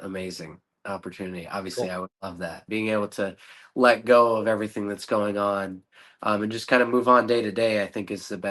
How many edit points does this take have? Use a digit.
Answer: 1